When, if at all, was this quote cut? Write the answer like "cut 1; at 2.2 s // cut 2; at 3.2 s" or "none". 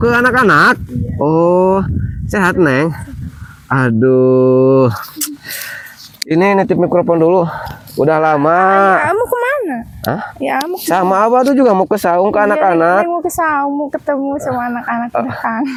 none